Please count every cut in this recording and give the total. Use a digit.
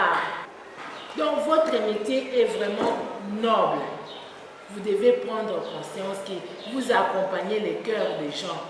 0